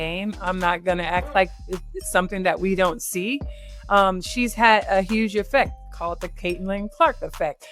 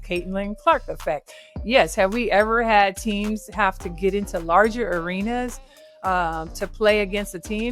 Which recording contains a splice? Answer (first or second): first